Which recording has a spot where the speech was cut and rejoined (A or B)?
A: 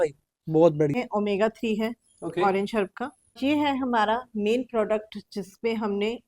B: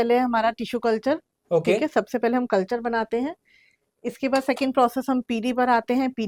A